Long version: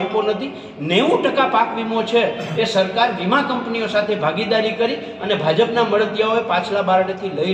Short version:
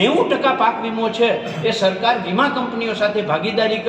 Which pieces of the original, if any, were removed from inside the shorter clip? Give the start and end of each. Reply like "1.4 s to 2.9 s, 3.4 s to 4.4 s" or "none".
none